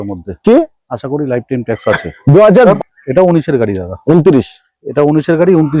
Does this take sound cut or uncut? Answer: cut